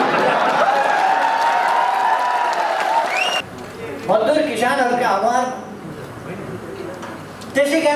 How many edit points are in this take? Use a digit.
1